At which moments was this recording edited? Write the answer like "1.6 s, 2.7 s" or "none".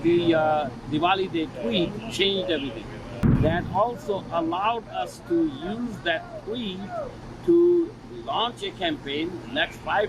3.2 s